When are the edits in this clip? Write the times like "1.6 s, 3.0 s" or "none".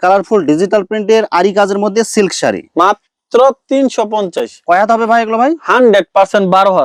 none